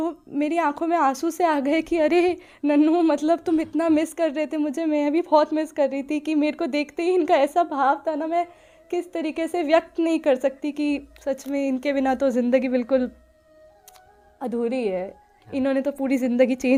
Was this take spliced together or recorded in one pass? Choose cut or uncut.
uncut